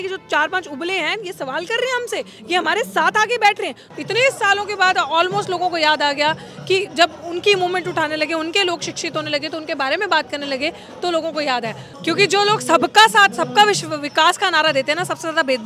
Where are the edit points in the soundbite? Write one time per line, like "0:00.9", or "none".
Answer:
0:03.8
0:11.9